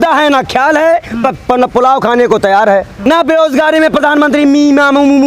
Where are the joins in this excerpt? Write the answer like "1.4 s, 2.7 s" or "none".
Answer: 3.1 s